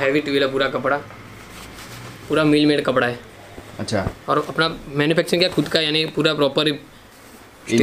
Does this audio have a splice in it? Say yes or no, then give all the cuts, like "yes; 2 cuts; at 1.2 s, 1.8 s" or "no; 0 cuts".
no; 0 cuts